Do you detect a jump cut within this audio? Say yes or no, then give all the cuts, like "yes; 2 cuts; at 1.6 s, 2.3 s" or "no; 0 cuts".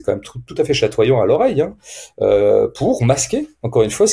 no; 0 cuts